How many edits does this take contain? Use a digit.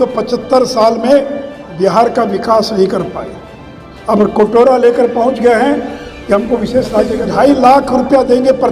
1